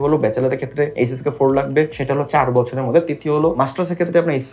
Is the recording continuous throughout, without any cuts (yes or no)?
no